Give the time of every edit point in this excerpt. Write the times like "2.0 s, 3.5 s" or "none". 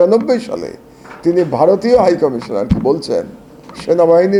none